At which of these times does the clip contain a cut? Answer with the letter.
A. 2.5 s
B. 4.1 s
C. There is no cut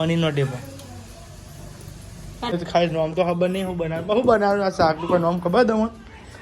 A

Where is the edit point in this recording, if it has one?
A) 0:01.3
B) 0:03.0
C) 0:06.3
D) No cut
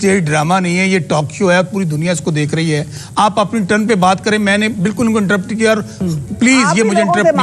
D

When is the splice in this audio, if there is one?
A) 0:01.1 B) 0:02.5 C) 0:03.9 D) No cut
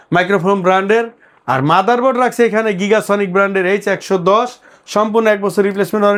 D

